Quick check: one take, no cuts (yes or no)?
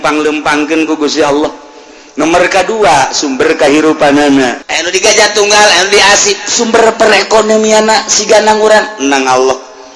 no